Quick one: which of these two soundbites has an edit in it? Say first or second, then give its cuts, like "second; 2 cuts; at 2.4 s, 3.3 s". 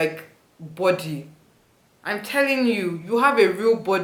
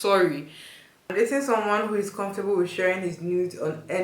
second; 1 cut; at 1.0 s